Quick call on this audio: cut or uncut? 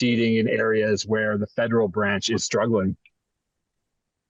uncut